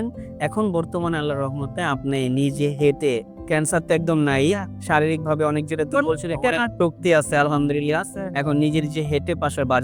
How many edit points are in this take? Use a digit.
0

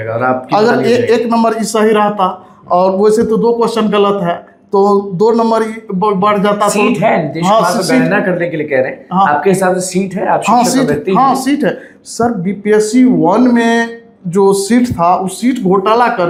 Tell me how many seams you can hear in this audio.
0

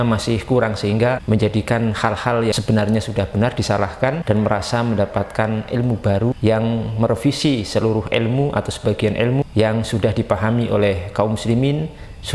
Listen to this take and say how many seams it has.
5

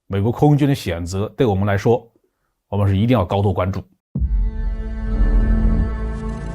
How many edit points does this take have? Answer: 1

